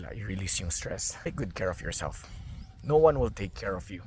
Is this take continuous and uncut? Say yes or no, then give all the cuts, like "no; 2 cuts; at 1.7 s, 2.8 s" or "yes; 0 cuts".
no; 1 cut; at 1.3 s